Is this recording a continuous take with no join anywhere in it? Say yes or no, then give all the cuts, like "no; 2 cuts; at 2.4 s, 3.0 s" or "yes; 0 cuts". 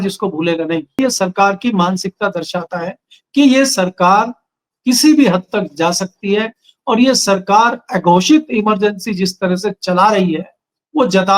no; 1 cut; at 1.0 s